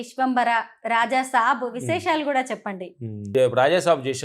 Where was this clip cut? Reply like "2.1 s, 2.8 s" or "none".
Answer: none